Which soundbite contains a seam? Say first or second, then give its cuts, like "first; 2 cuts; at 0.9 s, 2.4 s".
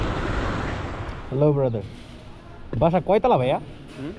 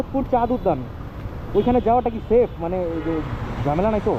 first; 1 cut; at 1.0 s